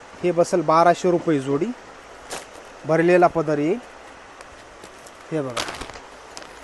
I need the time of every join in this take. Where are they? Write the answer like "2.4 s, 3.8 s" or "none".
none